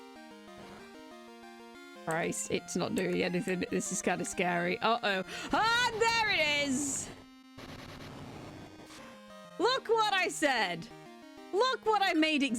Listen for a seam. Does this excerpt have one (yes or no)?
yes